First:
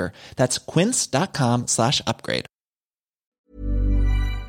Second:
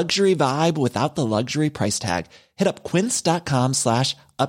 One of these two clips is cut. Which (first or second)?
first